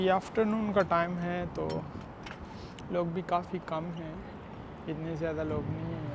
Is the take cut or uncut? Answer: uncut